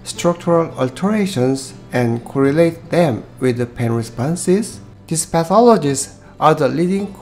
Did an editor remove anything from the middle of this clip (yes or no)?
yes